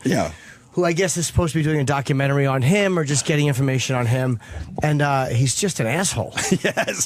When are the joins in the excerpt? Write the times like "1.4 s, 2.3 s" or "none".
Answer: 5.6 s